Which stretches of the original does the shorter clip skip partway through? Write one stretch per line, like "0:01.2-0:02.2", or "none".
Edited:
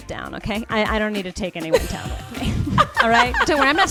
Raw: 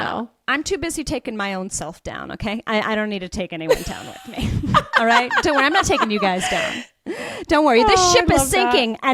none